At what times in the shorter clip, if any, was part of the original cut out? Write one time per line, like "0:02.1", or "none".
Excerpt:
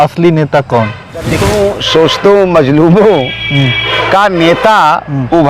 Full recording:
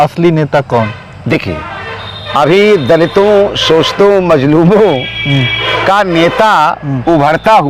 0:01.4